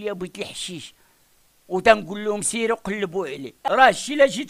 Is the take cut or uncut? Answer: cut